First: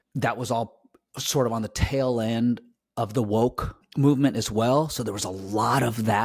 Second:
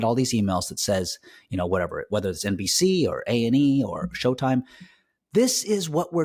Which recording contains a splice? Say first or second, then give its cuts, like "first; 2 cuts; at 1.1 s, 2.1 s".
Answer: first; 1 cut; at 3.8 s